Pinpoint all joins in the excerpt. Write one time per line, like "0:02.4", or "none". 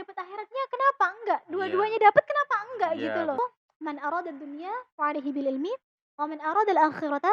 0:03.4